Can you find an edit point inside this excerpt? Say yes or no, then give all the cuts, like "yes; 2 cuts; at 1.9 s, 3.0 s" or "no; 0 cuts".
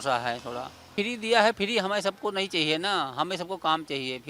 yes; 1 cut; at 0.9 s